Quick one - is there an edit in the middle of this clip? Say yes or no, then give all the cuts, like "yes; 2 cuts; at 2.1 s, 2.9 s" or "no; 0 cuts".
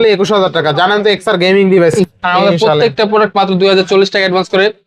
yes; 1 cut; at 2.0 s